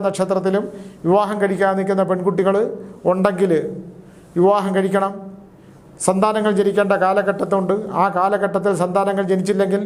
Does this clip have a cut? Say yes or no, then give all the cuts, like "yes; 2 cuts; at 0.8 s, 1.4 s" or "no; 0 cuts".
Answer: no; 0 cuts